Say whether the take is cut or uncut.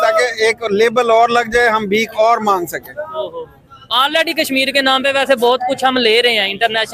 uncut